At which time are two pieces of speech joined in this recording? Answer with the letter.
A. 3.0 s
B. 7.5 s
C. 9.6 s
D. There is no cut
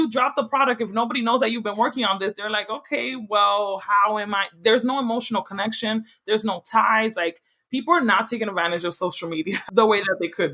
C